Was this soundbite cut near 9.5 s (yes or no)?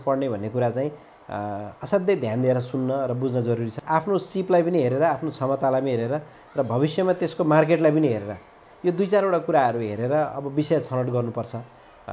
no